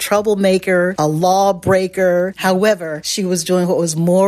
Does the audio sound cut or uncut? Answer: cut